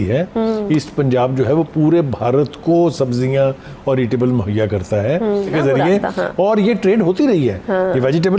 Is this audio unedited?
no; 1 cut; at 5.5 s

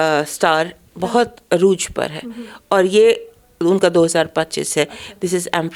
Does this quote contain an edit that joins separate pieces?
no; 0 cuts

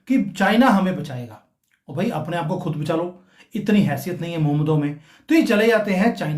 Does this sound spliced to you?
no; 0 cuts

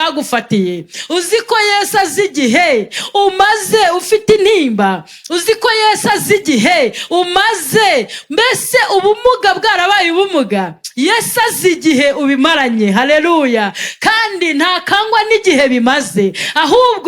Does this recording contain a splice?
no; 0 cuts

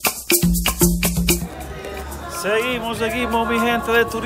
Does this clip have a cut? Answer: yes; 1 cut; at 1.4 s

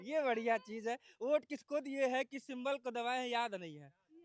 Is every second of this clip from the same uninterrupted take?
yes; 0 cuts

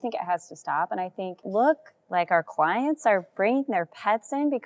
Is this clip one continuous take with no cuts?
no; 1 cut; at 1.5 s

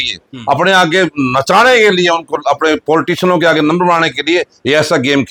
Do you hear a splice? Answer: no; 0 cuts

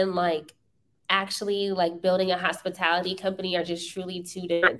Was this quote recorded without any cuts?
yes; 0 cuts

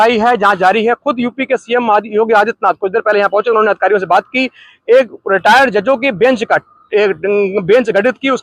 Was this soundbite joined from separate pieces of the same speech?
no; 0 cuts

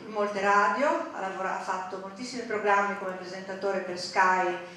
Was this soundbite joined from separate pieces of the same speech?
no; 0 cuts

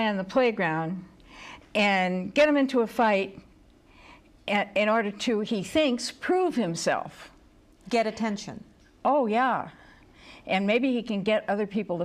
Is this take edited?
yes; 1 cut; at 3.4 s

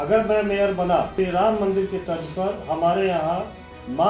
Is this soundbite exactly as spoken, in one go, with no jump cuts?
no; 1 cut; at 1.1 s

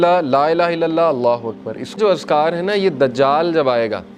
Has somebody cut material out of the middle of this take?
yes; 1 cut; at 2.0 s

